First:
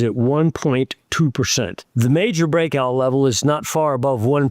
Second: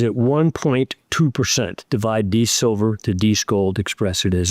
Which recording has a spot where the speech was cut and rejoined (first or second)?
first